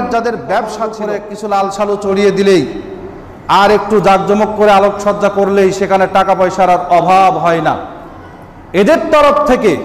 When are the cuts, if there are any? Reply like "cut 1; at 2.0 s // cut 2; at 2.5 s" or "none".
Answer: cut 1; at 0.9 s

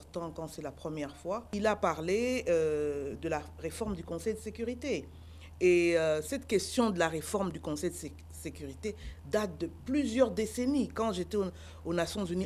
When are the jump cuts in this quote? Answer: cut 1; at 1.5 s

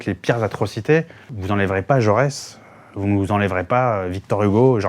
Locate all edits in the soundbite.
cut 1; at 1.4 s

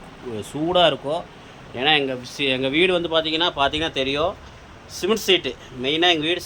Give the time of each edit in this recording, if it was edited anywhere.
none

